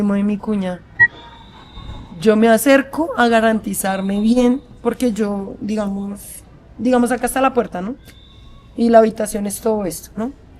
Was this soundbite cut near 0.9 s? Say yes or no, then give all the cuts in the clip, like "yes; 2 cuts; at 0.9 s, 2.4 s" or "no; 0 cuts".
no; 0 cuts